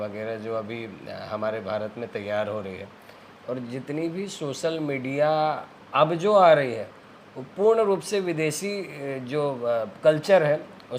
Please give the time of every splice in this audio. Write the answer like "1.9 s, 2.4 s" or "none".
none

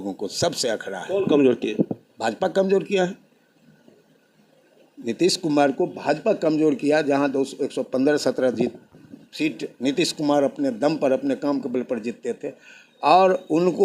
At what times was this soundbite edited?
none

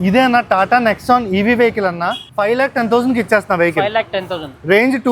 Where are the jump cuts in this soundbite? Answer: 2.2 s

